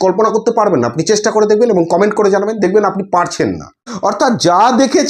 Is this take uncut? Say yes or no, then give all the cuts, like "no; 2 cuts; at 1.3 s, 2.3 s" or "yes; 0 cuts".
yes; 0 cuts